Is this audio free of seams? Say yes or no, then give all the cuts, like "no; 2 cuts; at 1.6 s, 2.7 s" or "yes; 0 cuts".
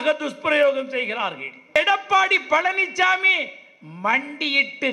no; 1 cut; at 1.7 s